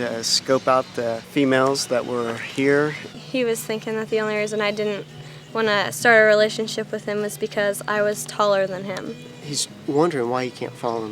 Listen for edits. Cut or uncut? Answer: cut